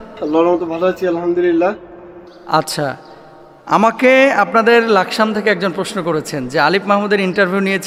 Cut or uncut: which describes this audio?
uncut